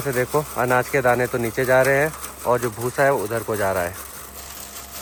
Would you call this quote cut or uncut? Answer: uncut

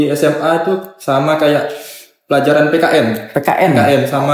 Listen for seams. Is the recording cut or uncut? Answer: uncut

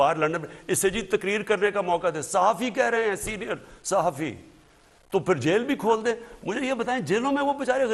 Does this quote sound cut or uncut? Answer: uncut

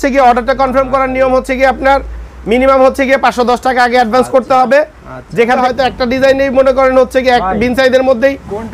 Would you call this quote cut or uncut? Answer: cut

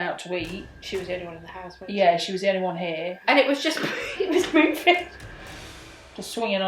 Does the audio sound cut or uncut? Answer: cut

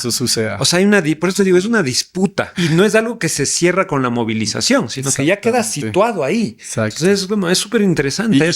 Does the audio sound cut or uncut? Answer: cut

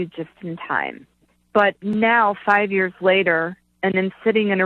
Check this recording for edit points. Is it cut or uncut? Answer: cut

